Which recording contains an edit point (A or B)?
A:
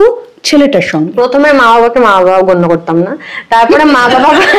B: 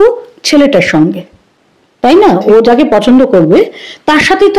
A